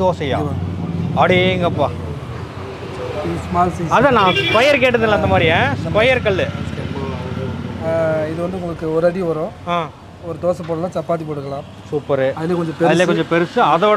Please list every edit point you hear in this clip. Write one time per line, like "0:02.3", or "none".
none